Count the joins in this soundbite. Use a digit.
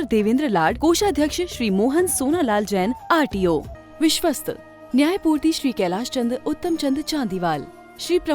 1